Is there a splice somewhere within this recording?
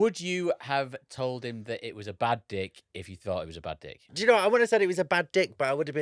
yes; 1 cut; at 4.1 s

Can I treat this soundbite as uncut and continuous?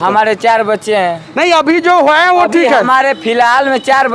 yes; 0 cuts

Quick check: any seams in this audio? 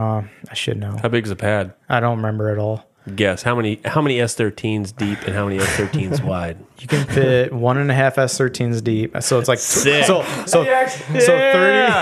yes; 1 cut; at 1.8 s

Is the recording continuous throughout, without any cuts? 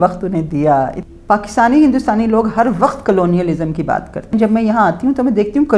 no; 2 cuts; at 1.0 s, 4.3 s

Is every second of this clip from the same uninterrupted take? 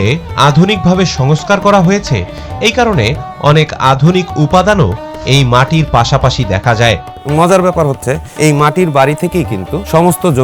no; 1 cut; at 7.2 s

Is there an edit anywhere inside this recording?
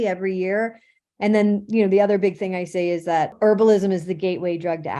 yes; 1 cut; at 3.3 s

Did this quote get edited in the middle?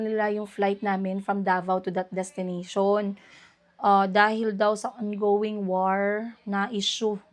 no; 0 cuts

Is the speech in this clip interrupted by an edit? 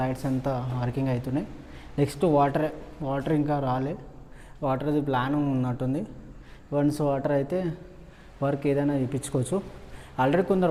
no; 0 cuts

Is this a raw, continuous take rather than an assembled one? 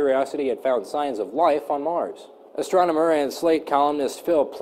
yes; 0 cuts

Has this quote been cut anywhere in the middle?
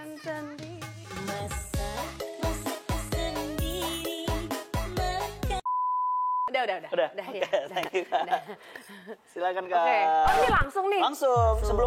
no; 0 cuts

